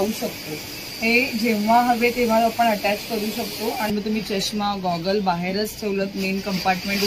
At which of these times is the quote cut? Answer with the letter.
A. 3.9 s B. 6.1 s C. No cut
A